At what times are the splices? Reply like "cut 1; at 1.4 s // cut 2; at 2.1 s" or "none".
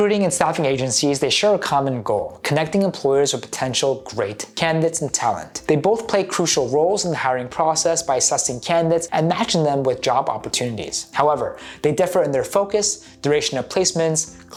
none